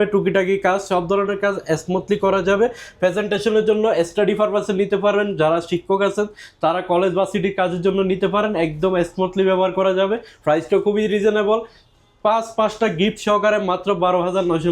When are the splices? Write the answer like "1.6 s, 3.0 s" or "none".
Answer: none